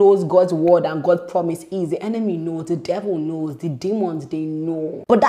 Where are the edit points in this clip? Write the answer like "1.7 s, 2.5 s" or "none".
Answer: none